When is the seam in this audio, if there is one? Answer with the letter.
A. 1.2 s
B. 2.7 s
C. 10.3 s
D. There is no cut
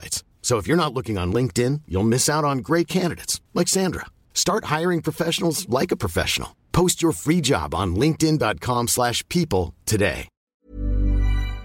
C